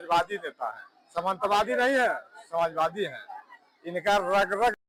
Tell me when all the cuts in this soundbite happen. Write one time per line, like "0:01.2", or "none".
none